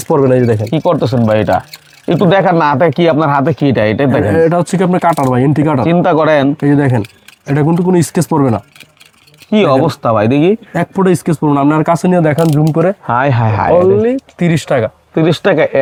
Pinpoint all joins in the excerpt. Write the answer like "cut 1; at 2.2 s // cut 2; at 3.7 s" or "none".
none